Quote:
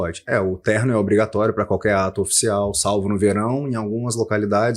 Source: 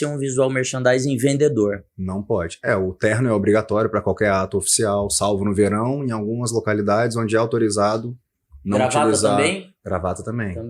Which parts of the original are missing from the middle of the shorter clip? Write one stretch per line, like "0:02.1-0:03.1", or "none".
none